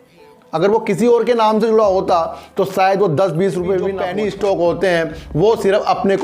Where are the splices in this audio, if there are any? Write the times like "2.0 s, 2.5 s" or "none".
4.0 s